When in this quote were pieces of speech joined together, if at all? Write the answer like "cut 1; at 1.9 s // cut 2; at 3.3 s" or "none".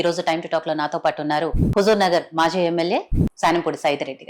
cut 1; at 1.6 s // cut 2; at 3.2 s